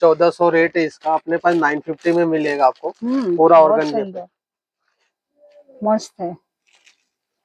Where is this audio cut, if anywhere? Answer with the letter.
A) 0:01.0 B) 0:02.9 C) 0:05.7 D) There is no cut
D